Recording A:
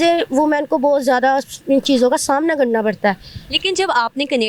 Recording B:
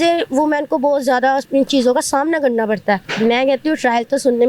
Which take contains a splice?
B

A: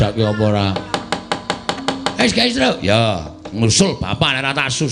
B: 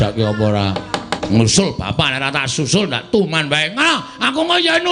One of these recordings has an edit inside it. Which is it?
B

